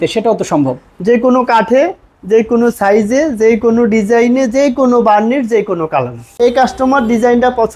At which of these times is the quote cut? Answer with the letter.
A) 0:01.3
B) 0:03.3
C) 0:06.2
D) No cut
C